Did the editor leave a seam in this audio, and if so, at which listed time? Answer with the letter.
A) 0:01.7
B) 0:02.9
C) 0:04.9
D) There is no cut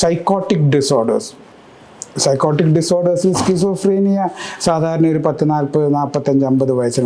D